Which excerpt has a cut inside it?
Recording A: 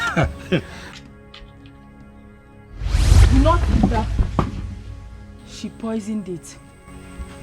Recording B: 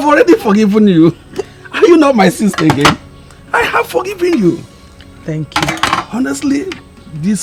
A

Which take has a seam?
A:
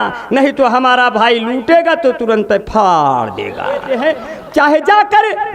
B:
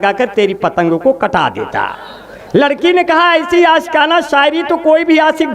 A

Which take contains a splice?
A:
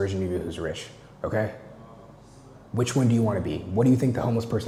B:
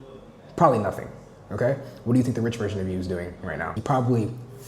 B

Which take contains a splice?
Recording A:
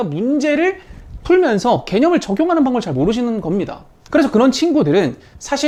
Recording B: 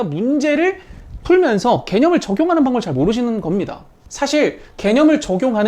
B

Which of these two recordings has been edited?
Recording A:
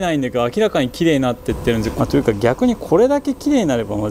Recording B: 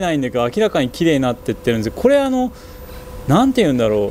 A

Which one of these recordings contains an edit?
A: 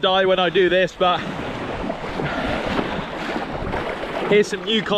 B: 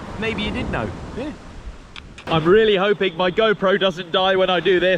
B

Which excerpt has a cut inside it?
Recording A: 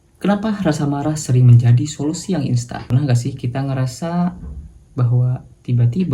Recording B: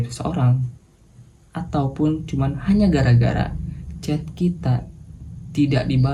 A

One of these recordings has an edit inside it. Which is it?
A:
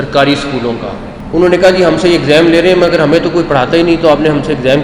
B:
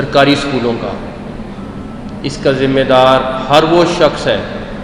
A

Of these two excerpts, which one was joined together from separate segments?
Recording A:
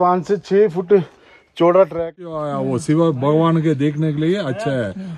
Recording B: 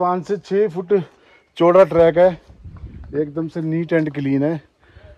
A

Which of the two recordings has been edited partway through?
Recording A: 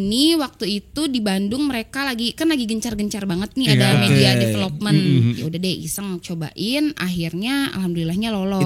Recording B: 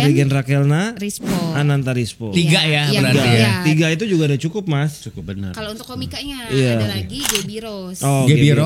A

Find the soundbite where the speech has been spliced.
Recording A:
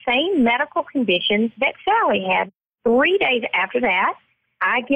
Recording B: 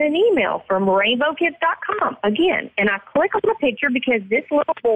A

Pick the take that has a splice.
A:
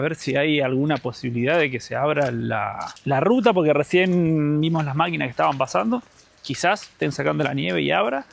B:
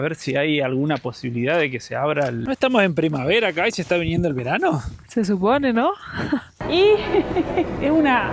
B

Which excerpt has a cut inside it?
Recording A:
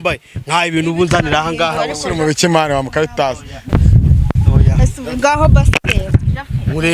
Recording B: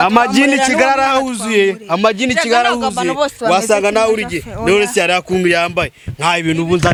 A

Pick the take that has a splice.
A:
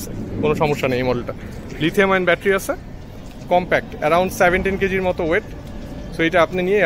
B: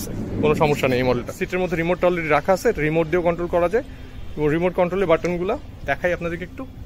B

